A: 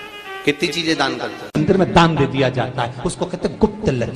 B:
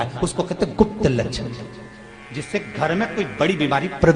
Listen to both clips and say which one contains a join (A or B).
A